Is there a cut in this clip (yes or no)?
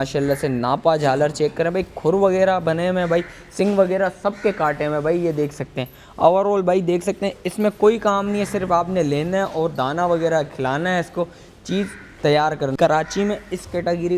yes